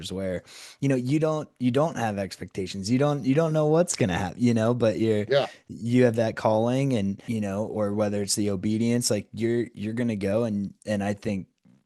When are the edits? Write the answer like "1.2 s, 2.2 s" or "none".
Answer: 7.2 s, 10.8 s